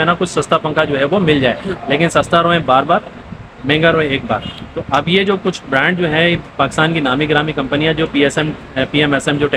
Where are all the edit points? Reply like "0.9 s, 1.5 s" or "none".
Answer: none